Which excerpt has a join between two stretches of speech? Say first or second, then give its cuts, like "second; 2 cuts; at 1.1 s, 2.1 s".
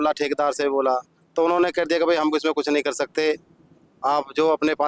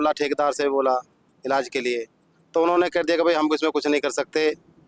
first; 1 cut; at 1.2 s